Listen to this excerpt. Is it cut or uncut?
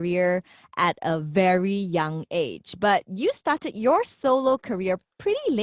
uncut